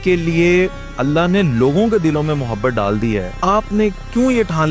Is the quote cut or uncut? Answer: cut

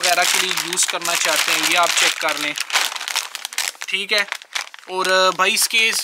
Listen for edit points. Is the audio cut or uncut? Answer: uncut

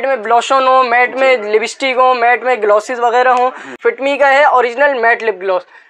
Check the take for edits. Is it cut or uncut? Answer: cut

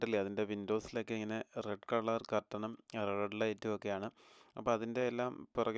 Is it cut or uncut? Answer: uncut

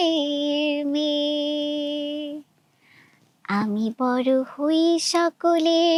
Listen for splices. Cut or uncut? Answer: uncut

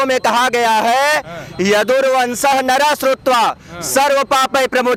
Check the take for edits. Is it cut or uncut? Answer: uncut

